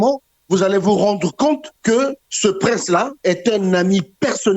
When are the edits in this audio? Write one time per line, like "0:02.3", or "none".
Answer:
0:01.9
0:03.1